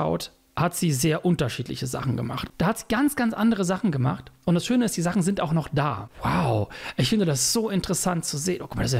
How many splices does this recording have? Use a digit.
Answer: 2